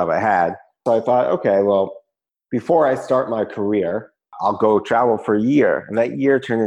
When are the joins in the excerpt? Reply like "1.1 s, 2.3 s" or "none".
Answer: 0.8 s, 4.3 s